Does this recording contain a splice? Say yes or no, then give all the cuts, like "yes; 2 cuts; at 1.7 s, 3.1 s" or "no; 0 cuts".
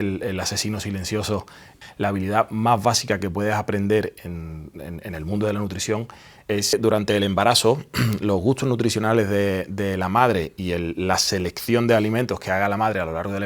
yes; 2 cuts; at 1.7 s, 6.7 s